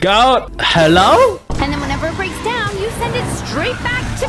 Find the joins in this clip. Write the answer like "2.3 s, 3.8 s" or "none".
1.5 s